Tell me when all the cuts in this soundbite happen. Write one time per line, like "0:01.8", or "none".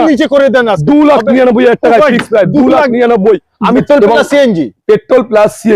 0:03.8